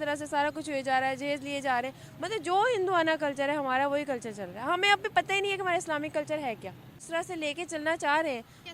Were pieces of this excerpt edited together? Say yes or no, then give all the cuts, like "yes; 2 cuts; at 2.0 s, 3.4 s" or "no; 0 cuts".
yes; 1 cut; at 7.0 s